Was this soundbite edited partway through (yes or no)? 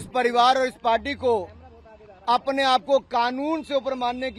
no